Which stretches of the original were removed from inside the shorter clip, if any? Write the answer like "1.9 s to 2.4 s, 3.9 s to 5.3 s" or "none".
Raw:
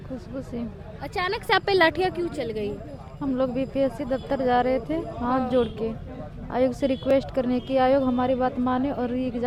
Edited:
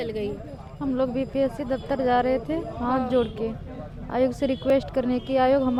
none